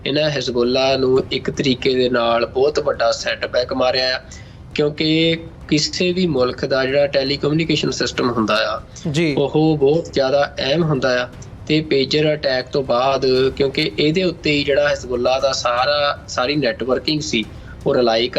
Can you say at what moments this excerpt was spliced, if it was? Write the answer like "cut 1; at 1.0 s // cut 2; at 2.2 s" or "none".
none